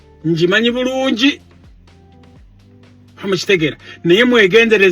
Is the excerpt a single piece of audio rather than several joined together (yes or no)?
no